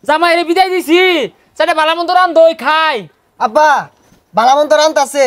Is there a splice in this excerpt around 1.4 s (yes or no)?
no